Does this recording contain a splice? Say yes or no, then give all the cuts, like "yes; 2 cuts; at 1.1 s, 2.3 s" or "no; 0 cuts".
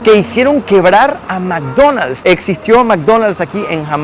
no; 0 cuts